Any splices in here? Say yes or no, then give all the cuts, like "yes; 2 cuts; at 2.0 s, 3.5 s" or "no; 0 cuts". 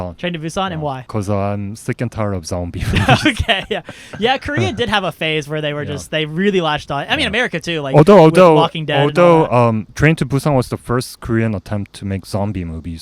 yes; 1 cut; at 1.0 s